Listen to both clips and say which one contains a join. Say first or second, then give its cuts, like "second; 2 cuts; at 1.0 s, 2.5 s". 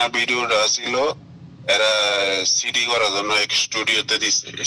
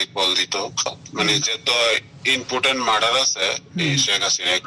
second; 1 cut; at 1.0 s